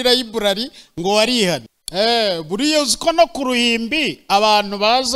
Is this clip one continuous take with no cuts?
no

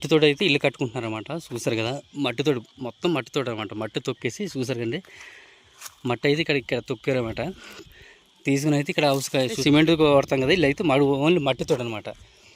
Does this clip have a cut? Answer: yes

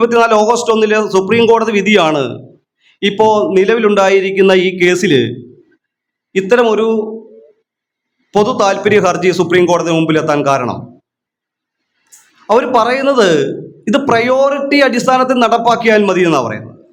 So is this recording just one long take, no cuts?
yes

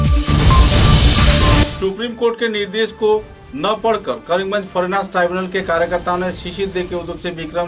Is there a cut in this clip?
no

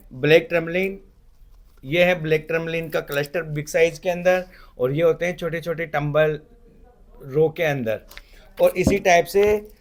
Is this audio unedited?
yes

